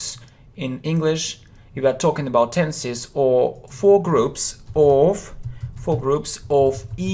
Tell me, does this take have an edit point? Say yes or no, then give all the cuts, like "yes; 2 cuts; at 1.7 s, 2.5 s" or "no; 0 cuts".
yes; 1 cut; at 3.3 s